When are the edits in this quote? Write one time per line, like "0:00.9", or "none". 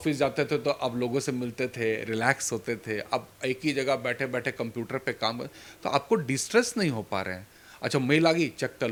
none